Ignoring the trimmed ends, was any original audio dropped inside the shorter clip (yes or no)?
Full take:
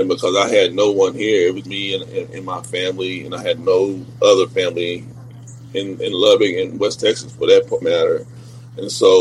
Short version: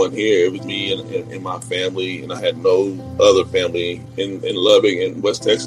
yes